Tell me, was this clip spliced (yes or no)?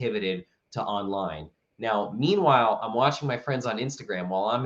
no